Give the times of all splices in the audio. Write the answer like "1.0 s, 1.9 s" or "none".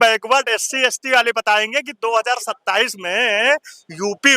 none